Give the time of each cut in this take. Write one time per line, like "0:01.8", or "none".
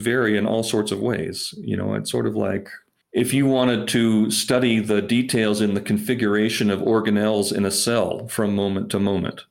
none